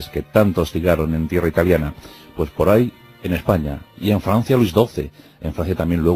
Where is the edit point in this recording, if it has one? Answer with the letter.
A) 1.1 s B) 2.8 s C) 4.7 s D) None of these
C